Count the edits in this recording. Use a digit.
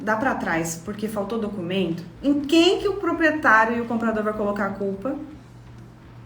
1